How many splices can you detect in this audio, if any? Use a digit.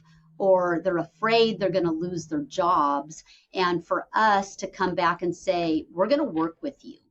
0